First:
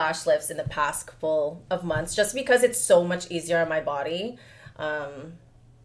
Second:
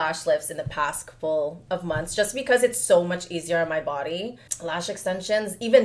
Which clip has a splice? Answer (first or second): second